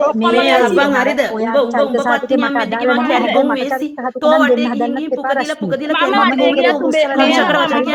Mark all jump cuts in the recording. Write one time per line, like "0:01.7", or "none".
none